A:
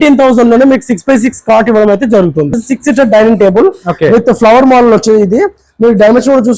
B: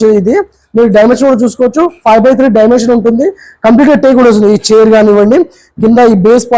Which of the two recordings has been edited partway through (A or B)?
A